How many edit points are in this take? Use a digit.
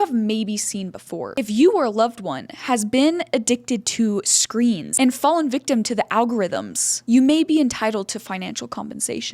1